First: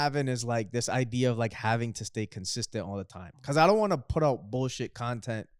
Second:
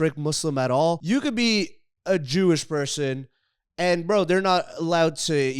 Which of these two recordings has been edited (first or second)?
second